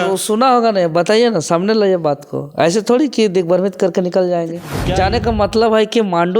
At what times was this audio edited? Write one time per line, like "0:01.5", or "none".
0:04.7